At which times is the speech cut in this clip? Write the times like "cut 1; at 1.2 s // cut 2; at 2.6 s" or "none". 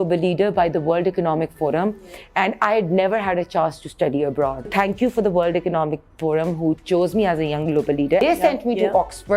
cut 1; at 4.7 s // cut 2; at 8.2 s